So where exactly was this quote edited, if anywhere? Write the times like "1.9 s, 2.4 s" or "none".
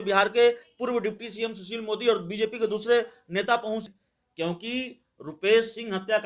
3.9 s